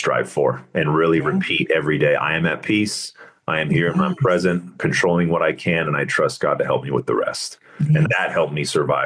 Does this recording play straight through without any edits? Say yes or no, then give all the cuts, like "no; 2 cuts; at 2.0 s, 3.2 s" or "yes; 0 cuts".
no; 1 cut; at 8.1 s